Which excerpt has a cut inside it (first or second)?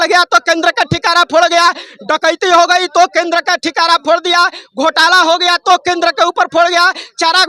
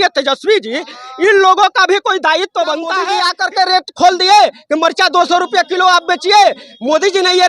second